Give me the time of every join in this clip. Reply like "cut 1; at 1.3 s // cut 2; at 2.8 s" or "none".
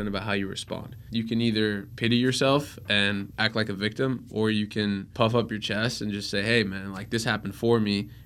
cut 1; at 0.9 s // cut 2; at 1.9 s // cut 3; at 3.3 s // cut 4; at 5.1 s